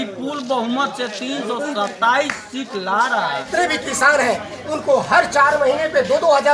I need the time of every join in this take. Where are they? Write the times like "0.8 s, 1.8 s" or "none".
3.4 s